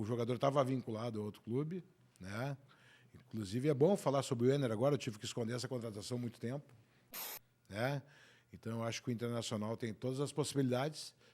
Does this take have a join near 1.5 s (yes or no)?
no